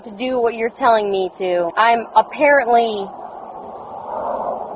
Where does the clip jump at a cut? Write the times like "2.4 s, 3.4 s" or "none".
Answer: 1.7 s